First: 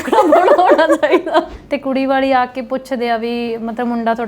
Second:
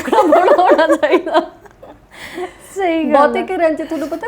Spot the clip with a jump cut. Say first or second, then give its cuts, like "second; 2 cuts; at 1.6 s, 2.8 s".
first; 1 cut; at 1.6 s